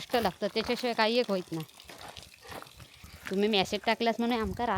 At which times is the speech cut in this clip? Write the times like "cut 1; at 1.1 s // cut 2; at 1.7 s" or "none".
cut 1; at 3.0 s